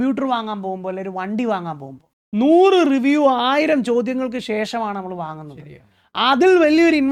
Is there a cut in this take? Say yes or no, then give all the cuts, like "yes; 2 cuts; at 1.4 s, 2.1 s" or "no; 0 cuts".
no; 0 cuts